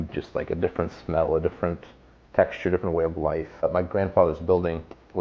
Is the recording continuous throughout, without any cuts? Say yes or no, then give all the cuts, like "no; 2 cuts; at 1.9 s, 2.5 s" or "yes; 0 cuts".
no; 1 cut; at 3.6 s